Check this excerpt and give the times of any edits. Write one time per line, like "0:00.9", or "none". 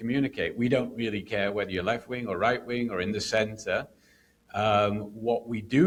none